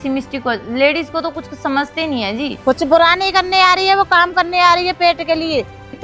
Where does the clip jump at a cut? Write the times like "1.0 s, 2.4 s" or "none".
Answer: 2.5 s

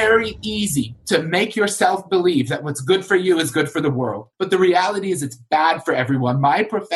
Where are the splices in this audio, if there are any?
1.0 s, 4.3 s

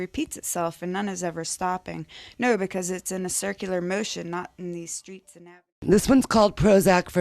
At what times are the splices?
5.4 s

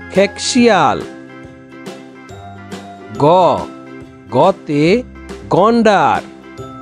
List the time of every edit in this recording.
none

